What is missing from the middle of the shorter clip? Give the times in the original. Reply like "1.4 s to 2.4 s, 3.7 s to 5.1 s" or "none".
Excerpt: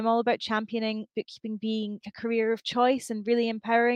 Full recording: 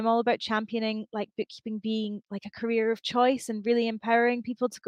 1.1 s to 1.3 s, 2.3 s to 2.5 s